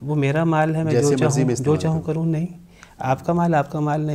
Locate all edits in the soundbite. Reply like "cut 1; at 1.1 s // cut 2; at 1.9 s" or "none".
none